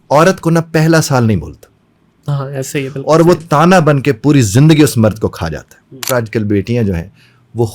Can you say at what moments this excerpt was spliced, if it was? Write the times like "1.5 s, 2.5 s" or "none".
6.1 s

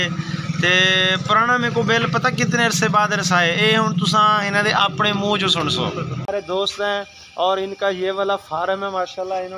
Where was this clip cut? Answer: 6.3 s

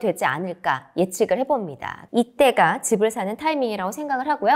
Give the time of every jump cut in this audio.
1.9 s

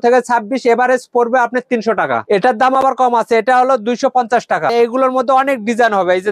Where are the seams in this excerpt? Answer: 2.2 s, 4.7 s

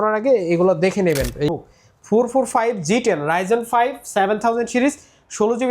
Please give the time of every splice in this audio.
1.5 s

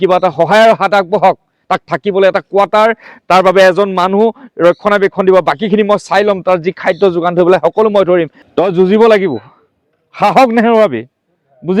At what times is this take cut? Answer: 8.4 s

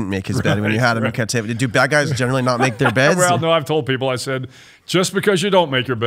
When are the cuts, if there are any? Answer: none

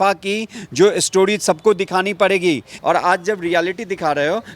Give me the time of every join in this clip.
2.7 s

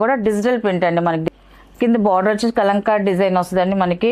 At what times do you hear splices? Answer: 1.3 s

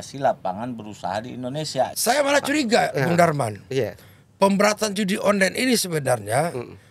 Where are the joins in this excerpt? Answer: 1.9 s

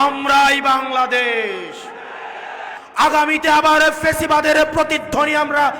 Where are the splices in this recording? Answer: 2.8 s

